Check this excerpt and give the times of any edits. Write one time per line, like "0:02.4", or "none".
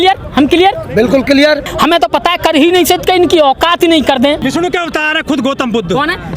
0:01.7
0:04.4